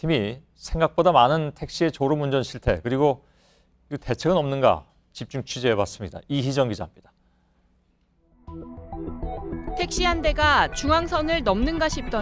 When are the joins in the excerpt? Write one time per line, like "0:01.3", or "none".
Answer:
0:02.6